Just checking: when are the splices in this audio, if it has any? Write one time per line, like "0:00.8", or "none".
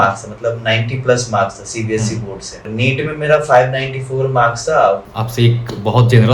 0:02.7
0:05.0